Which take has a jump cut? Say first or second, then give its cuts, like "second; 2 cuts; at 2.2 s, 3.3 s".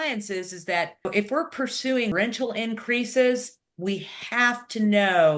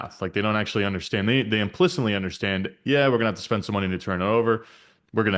first; 2 cuts; at 1.0 s, 2.1 s